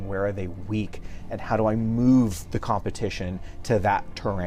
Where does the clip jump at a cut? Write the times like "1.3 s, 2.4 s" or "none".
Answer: none